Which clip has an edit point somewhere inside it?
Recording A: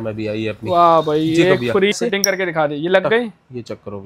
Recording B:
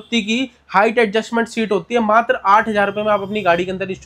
A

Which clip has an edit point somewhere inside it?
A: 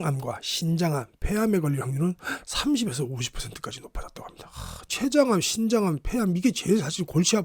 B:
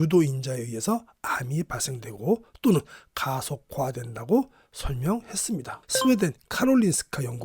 B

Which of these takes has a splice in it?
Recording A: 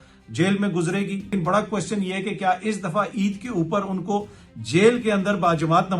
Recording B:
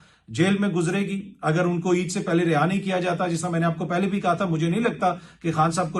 A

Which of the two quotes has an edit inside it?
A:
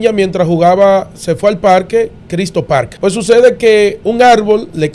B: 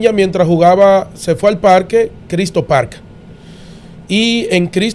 A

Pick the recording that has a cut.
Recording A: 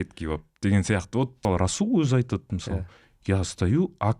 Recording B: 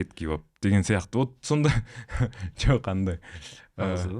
A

